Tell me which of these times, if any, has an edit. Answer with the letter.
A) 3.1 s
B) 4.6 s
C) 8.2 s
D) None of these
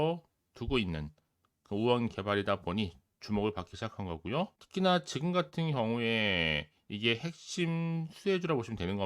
B